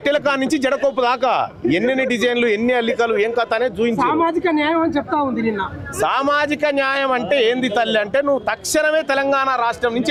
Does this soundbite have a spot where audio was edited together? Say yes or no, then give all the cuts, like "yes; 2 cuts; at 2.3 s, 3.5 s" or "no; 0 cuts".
no; 0 cuts